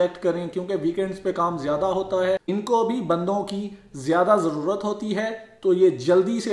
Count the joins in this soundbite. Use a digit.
1